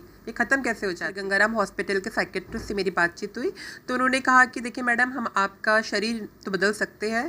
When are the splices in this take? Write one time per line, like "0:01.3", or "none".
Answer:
0:01.1